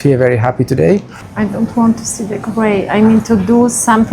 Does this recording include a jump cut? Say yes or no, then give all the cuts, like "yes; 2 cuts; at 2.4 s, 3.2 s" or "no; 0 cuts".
yes; 1 cut; at 1.2 s